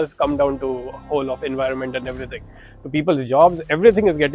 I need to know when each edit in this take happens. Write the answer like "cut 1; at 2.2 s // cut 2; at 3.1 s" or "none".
none